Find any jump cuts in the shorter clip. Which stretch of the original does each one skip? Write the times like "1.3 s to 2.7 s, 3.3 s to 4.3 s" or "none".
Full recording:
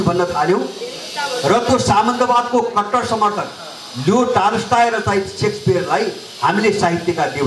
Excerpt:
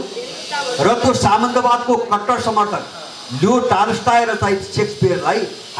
none